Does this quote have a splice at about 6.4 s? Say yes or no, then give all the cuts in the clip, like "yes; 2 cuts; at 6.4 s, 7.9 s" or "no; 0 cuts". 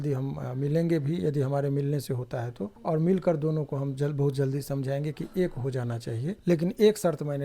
yes; 2 cuts; at 2.7 s, 6.4 s